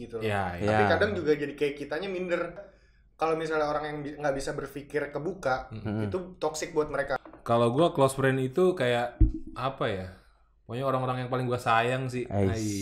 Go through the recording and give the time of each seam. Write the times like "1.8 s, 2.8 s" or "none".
2.7 s, 7.2 s